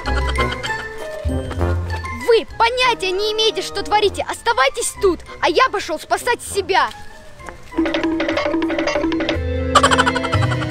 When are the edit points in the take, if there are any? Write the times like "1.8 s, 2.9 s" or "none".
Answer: 9.5 s